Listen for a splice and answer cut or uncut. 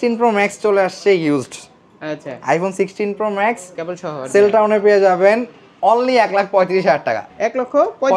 uncut